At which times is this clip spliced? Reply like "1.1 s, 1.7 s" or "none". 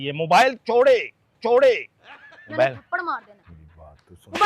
3.3 s

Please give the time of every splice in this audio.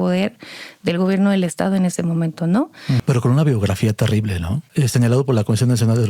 3.0 s, 4.6 s

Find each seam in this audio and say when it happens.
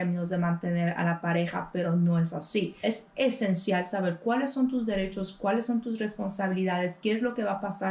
2.8 s

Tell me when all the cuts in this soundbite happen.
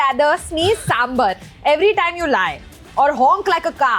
none

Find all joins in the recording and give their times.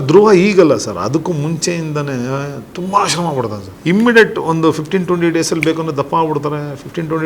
3.7 s

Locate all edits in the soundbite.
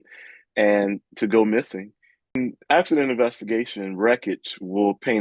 2.4 s

